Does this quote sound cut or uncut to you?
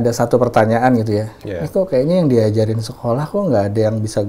uncut